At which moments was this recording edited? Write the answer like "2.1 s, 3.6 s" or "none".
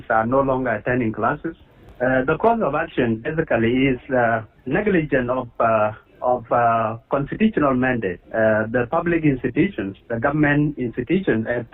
1.6 s